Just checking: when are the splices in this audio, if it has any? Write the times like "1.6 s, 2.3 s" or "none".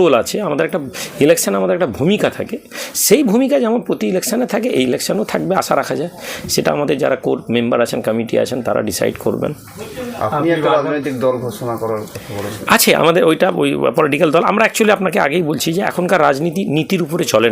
none